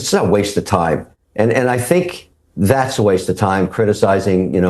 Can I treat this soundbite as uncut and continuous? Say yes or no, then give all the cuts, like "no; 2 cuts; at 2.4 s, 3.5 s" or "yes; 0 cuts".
yes; 0 cuts